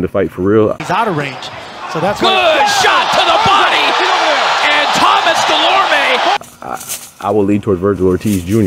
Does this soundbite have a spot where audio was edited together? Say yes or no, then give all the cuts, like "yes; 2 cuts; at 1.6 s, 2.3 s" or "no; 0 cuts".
yes; 2 cuts; at 0.9 s, 6.4 s